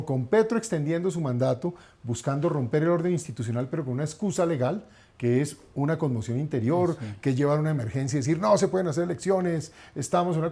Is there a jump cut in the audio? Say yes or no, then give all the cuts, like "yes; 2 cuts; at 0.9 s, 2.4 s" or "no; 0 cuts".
no; 0 cuts